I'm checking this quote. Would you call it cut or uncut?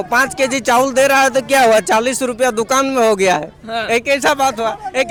uncut